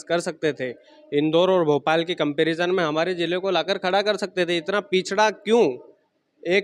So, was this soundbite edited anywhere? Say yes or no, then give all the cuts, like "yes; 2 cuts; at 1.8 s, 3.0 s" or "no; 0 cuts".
no; 0 cuts